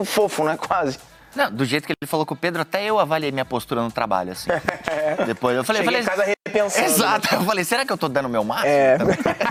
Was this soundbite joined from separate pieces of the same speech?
no; 0 cuts

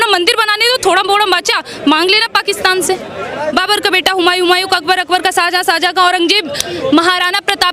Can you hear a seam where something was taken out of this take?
yes; 1 cut; at 3.5 s

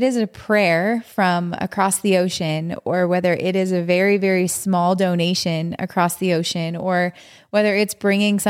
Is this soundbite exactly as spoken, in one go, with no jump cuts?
yes; 0 cuts

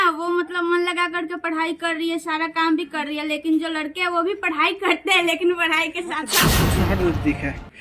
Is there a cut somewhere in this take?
yes; 1 cut; at 6.5 s

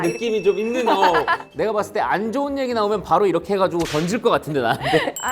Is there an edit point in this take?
yes; 1 cut; at 1.4 s

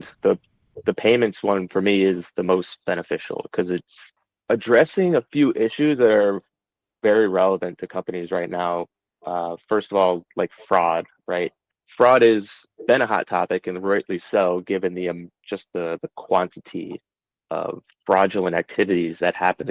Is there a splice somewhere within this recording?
no; 0 cuts

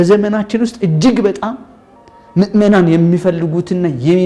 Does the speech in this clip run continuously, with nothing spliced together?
yes; 0 cuts

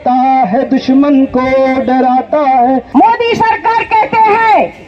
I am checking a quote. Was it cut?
yes; 1 cut; at 2.9 s

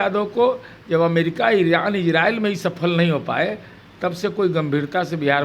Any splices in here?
no; 0 cuts

